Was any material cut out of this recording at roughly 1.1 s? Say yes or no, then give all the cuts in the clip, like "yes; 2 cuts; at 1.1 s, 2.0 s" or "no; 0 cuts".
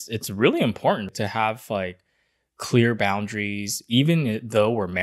yes; 1 cut; at 1.1 s